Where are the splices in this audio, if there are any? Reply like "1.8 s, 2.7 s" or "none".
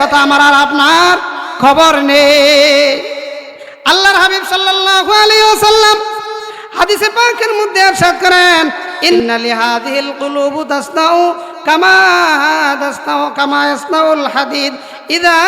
9.2 s